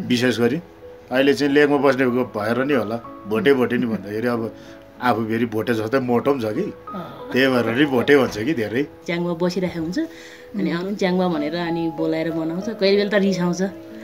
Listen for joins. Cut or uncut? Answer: cut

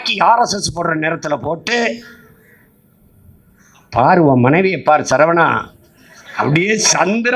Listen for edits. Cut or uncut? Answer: uncut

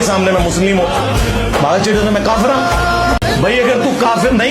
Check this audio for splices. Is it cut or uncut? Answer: cut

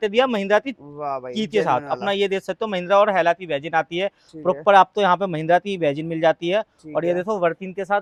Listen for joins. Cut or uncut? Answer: uncut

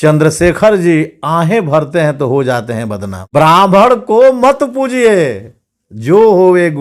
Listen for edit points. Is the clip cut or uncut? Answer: cut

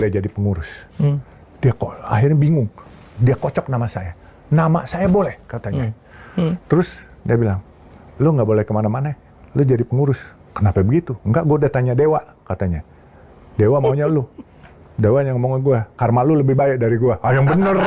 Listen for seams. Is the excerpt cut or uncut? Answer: uncut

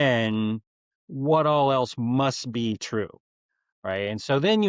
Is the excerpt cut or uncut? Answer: uncut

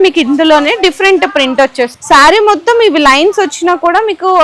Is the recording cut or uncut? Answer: cut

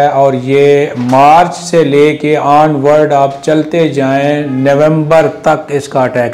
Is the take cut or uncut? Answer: uncut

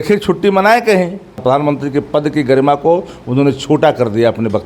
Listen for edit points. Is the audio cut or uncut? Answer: cut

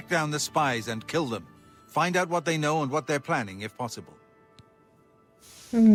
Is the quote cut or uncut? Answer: uncut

